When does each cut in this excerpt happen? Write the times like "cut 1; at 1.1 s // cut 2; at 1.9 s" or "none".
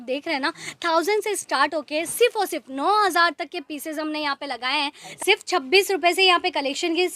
cut 1; at 5.1 s